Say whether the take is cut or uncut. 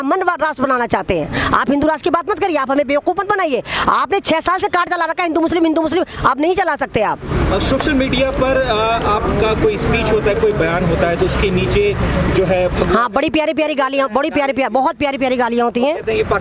uncut